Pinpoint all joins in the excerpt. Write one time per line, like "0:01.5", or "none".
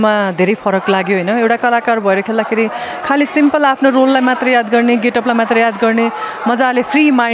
none